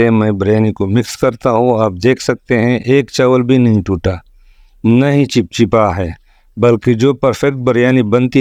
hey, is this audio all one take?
yes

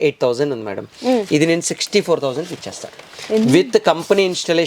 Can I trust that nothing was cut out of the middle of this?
yes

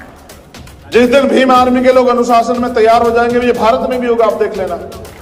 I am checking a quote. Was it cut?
no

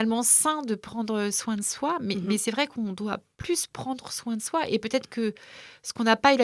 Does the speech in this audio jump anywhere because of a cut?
no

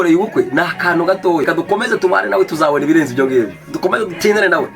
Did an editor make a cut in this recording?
yes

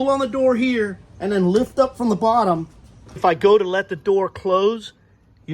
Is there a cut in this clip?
yes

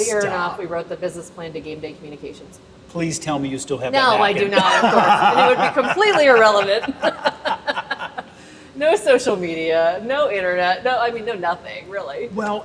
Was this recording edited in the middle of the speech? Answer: no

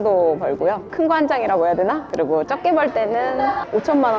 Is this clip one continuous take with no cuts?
yes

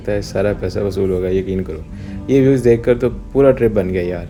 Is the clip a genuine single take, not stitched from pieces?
yes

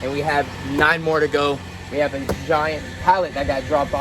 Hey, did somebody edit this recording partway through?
yes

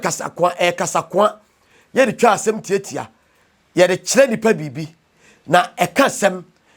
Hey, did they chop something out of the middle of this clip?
no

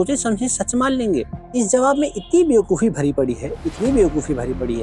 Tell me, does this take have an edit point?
yes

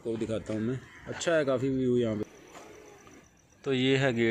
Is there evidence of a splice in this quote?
yes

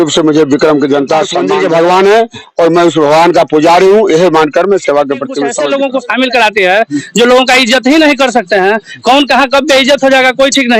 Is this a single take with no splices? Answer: no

